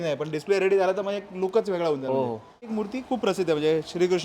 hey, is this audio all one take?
no; 1 cut; at 2.7 s

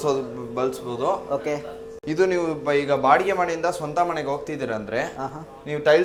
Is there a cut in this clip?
no; 0 cuts

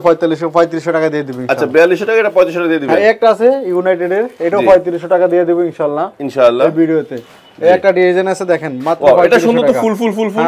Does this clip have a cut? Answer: no; 0 cuts

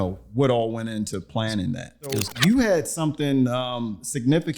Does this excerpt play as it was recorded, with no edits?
no; 1 cut; at 2.3 s

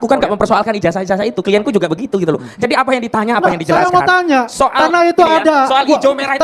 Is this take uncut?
yes; 0 cuts

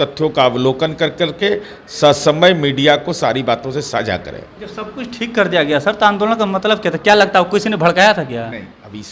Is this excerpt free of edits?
yes; 0 cuts

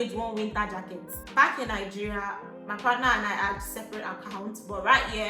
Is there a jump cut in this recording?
yes; 1 cut; at 1.2 s

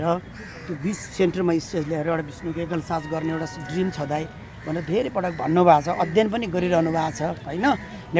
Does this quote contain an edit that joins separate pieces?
no; 0 cuts

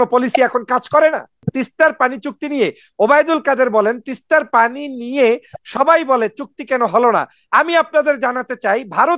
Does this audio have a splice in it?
yes; 1 cut; at 1.4 s

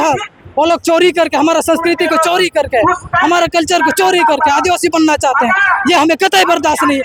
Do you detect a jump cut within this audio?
no; 0 cuts

